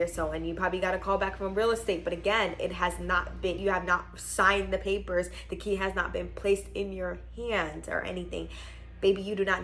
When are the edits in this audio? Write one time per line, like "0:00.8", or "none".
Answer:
none